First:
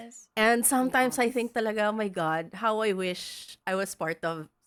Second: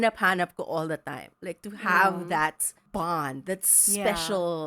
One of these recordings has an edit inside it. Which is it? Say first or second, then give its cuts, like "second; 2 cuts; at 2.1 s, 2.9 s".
second; 1 cut; at 2.7 s